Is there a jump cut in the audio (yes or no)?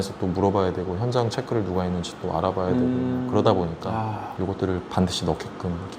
no